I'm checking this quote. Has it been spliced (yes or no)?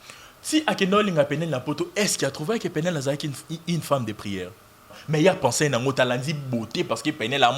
yes